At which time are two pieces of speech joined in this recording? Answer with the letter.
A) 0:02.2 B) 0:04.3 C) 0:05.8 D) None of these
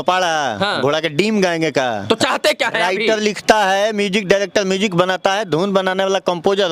D